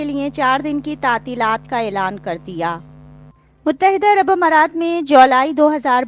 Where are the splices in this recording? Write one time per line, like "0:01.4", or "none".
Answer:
0:03.5